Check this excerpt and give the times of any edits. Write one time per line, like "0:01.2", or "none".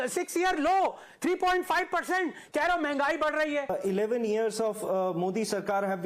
0:03.7